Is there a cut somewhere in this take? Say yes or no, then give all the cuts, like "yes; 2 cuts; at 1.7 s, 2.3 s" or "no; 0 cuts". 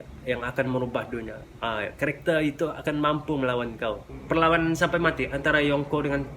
yes; 1 cut; at 4.1 s